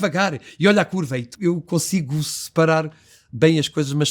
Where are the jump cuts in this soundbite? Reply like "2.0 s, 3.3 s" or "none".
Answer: 1.3 s